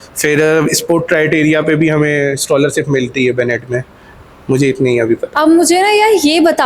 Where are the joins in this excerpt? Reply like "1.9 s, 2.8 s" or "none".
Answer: none